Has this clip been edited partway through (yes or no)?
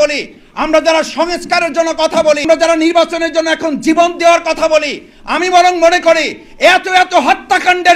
yes